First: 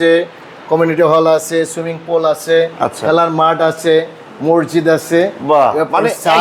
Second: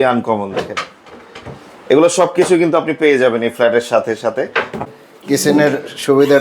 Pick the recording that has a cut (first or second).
second